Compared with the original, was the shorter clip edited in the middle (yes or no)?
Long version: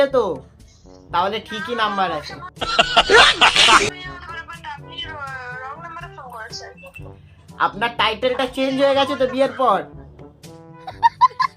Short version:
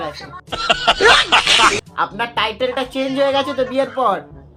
yes